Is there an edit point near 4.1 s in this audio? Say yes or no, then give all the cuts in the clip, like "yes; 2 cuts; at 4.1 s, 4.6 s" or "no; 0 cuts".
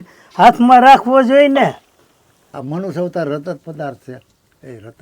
no; 1 cut; at 2.5 s